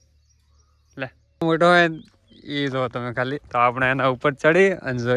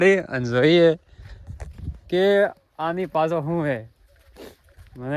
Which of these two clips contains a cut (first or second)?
first